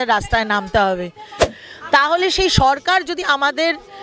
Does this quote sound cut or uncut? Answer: cut